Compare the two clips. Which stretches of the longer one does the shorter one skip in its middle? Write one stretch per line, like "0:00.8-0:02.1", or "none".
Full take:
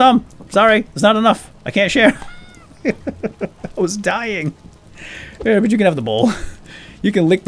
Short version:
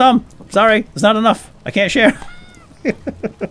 none

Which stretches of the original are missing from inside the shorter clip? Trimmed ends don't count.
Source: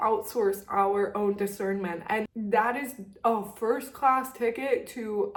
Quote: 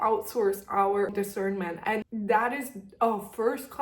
0:01.1-0:01.4

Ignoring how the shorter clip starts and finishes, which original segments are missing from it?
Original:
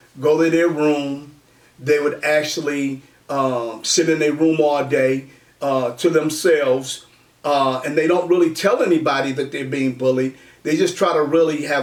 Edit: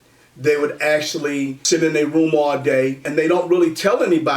0:03.0-0:03.8
0:05.3-0:07.8

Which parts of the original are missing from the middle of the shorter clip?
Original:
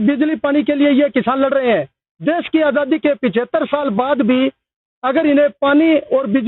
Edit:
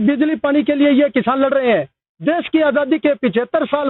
none

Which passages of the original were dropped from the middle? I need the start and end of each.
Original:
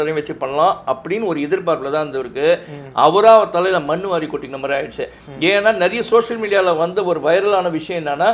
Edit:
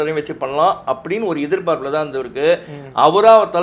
none

